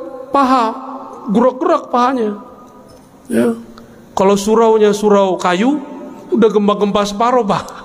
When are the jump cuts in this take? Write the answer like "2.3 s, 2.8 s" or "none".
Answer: none